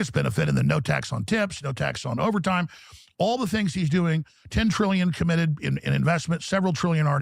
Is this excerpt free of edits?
yes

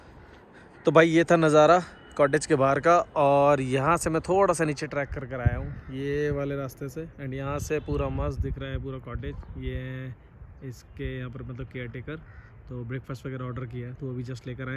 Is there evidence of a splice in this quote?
no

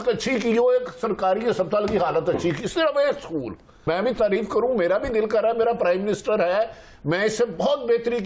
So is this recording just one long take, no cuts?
no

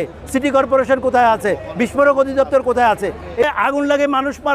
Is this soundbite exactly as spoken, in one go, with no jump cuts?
no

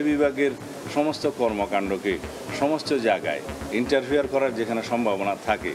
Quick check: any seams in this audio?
no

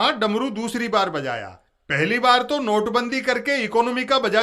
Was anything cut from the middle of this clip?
no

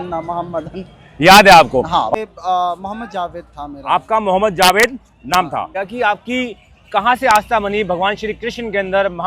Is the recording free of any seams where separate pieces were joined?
no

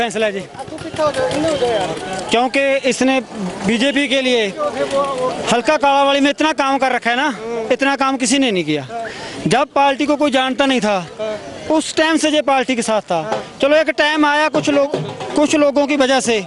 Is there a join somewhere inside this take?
no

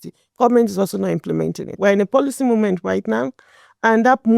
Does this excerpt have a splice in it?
yes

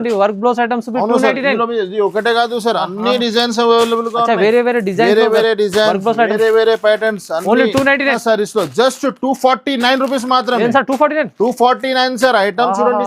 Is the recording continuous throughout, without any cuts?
no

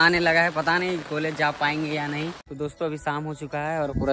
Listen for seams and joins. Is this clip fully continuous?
no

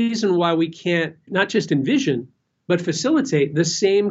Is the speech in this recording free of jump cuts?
no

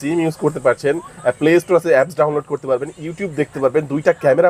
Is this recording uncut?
yes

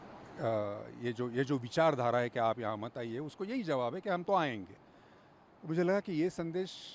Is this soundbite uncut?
yes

